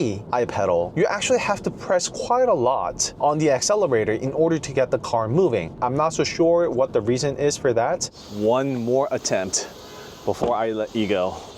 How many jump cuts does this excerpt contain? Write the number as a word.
one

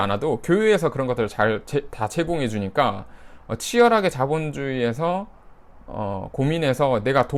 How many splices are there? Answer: zero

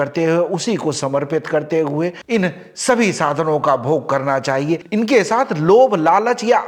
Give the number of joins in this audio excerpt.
zero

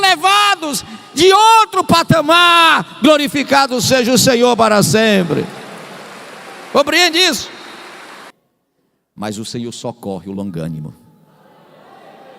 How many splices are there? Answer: one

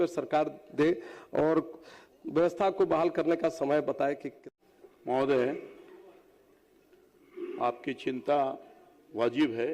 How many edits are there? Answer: one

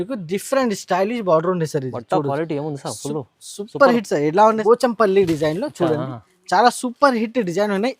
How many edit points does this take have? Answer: one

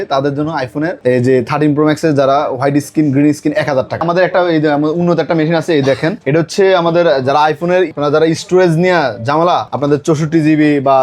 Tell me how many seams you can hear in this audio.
one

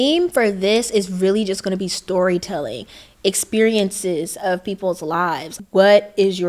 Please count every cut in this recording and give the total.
one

